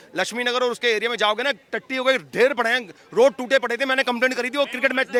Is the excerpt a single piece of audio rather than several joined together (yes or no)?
yes